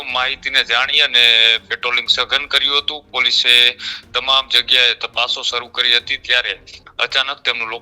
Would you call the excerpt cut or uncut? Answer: uncut